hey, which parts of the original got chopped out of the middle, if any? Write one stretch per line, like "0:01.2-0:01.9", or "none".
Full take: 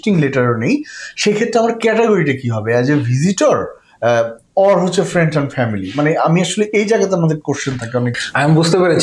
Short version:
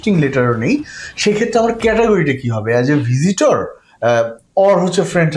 none